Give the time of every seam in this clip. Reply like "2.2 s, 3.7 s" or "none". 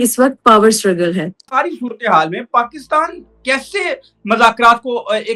1.5 s